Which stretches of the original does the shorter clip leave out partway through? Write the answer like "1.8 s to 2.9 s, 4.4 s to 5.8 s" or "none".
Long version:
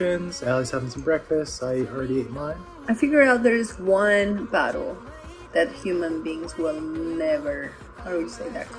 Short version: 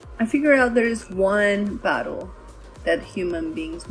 none